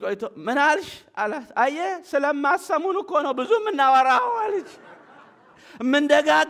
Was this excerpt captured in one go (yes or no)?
yes